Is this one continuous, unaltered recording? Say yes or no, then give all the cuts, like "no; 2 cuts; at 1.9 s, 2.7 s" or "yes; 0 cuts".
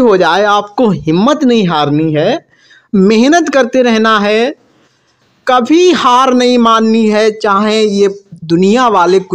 yes; 0 cuts